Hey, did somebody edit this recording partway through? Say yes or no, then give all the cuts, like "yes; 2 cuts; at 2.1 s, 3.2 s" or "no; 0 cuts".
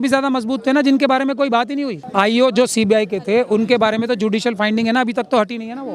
yes; 1 cut; at 2.0 s